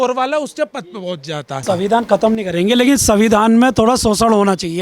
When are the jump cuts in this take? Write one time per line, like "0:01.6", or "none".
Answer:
0:01.5